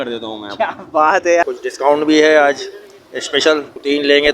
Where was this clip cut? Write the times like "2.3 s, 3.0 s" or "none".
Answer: 1.4 s